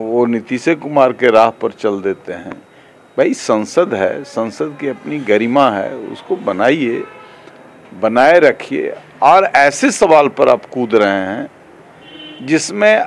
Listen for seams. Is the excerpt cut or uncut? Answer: uncut